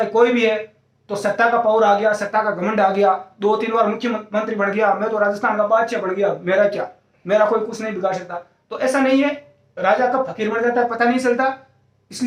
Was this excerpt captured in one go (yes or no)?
yes